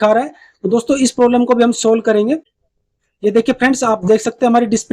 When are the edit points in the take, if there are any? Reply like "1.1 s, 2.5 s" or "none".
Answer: 2.5 s